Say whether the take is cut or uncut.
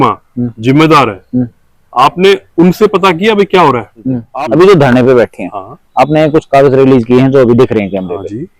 cut